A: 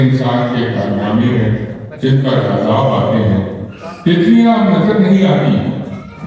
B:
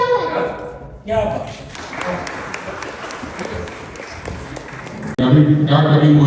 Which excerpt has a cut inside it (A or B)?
B